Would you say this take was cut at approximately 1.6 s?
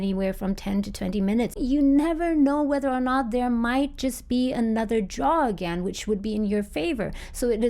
yes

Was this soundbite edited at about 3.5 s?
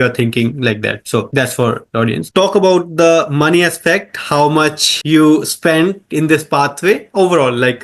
no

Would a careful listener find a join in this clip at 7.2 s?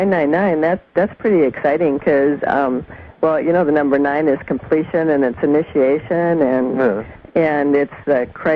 no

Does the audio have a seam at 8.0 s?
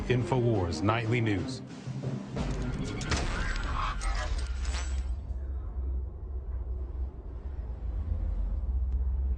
yes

